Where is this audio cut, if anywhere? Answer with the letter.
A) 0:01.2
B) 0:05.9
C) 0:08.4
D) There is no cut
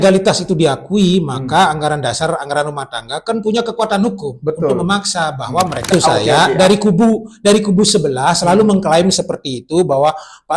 B